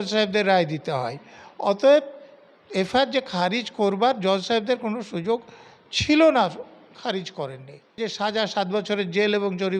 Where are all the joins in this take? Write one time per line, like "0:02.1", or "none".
0:08.0